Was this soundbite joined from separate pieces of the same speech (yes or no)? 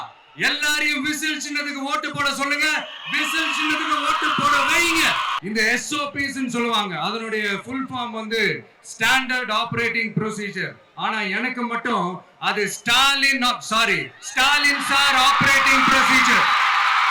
yes